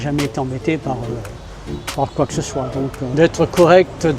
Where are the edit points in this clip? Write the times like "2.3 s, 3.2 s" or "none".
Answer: 3.0 s